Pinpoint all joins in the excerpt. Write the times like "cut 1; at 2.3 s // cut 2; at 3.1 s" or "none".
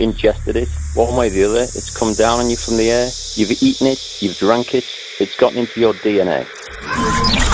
cut 1; at 6.6 s